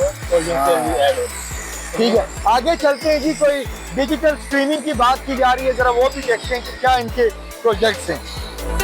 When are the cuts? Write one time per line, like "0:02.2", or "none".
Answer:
none